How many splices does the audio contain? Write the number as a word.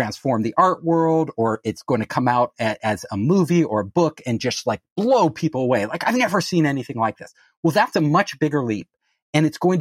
zero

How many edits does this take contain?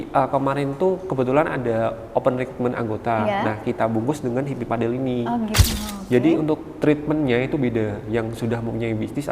one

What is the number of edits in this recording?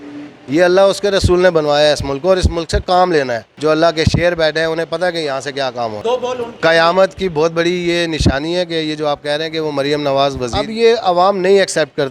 three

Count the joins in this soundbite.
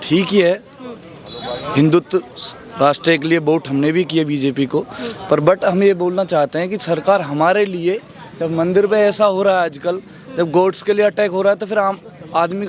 zero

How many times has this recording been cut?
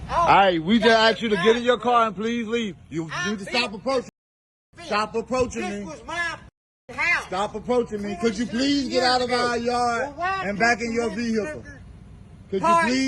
one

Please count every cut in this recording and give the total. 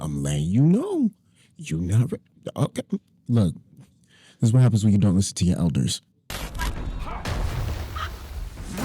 one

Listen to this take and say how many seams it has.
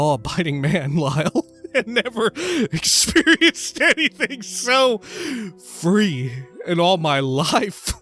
zero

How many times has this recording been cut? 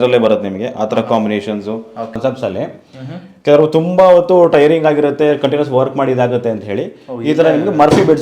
one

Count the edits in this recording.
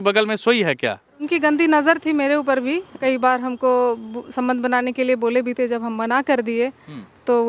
two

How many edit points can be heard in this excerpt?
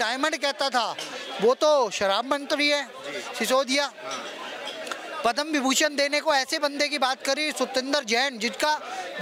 zero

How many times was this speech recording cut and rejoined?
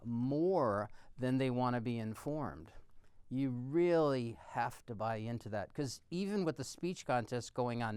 zero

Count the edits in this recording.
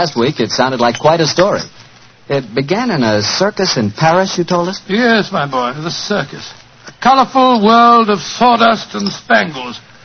zero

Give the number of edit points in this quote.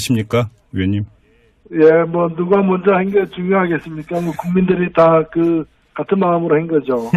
one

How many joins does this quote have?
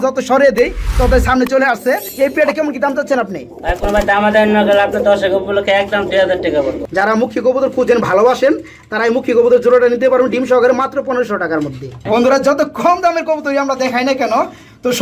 three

